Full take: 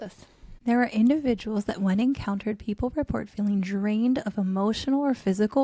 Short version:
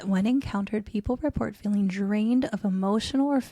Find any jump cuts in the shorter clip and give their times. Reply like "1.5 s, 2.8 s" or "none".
none